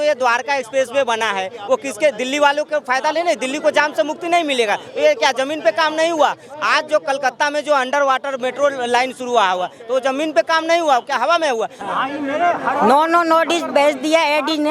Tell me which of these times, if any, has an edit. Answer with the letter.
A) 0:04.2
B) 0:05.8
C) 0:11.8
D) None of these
C